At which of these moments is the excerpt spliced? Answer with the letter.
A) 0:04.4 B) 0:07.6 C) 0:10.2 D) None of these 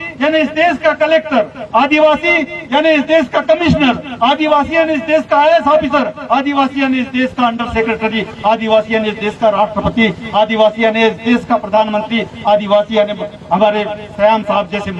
D